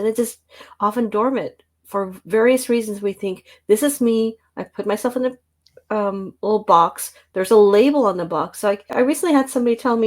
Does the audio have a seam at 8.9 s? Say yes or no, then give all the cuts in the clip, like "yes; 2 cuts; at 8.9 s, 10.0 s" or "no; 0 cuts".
yes; 1 cut; at 8.9 s